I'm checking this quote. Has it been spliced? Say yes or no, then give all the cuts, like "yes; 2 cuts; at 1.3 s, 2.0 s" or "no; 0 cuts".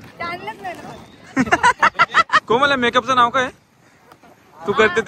yes; 1 cut; at 2.4 s